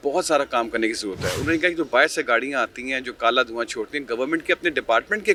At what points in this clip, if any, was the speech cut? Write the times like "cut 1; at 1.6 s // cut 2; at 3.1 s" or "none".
none

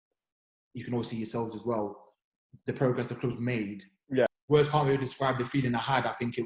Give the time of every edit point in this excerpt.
cut 1; at 4.3 s

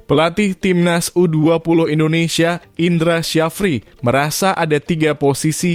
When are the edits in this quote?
none

